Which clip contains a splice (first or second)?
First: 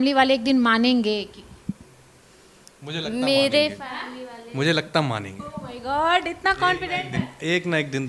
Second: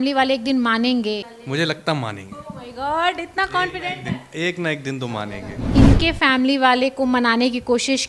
second